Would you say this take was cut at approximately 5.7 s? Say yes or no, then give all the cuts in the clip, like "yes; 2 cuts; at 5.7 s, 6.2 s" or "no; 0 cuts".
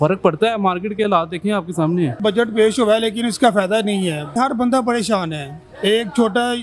no; 2 cuts; at 2.2 s, 4.3 s